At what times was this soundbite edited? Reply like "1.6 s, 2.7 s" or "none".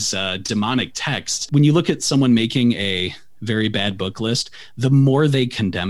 1.5 s